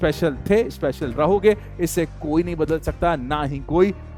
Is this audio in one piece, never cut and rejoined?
yes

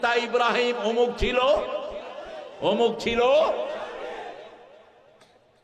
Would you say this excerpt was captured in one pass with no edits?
yes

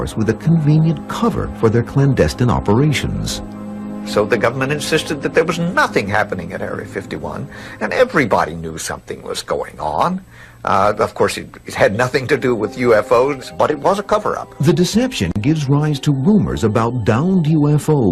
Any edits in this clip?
yes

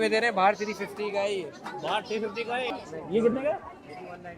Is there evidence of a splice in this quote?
yes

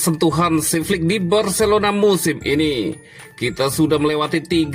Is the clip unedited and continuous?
yes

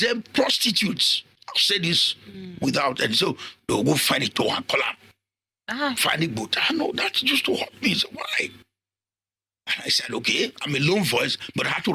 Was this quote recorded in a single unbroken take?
yes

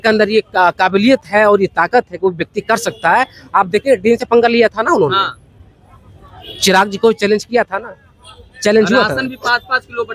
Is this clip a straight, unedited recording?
yes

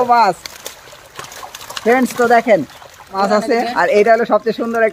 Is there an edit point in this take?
yes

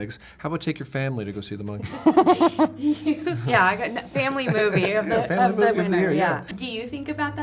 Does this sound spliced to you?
no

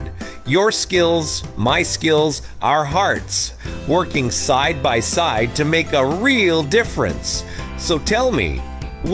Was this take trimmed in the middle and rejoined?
no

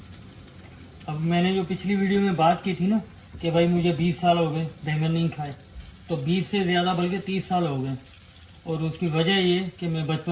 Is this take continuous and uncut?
yes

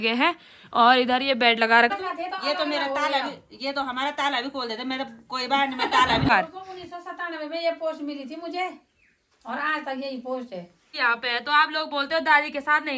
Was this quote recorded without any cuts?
no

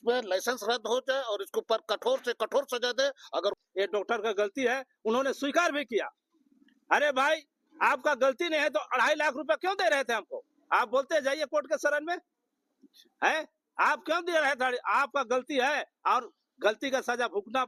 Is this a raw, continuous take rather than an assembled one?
no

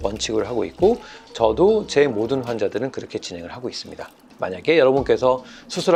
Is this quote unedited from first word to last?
yes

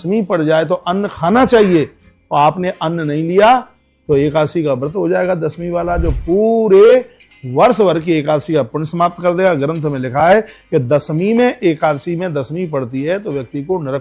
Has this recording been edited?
no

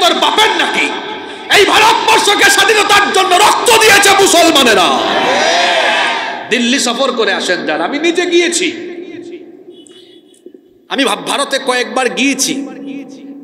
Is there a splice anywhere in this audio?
no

